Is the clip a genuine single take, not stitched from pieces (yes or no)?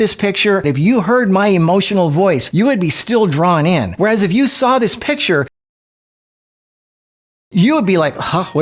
yes